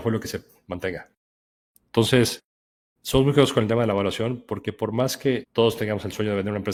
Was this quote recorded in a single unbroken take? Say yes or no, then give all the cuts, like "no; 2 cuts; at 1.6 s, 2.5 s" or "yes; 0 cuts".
yes; 0 cuts